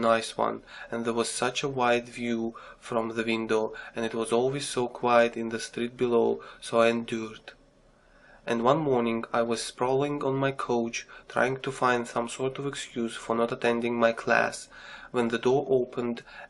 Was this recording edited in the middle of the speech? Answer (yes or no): yes